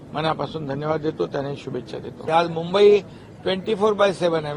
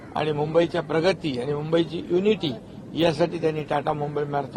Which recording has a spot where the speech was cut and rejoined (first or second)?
first